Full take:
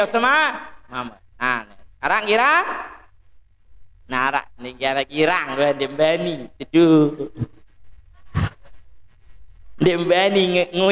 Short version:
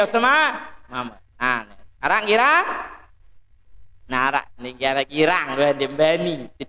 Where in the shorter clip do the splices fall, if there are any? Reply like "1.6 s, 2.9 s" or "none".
none